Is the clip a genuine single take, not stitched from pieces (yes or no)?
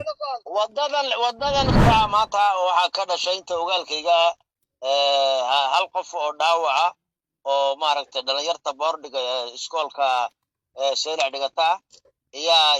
no